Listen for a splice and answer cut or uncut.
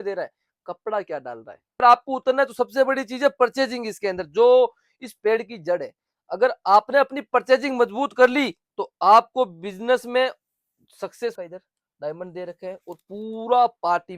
cut